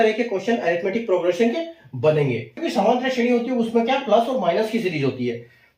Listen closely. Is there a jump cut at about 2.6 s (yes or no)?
yes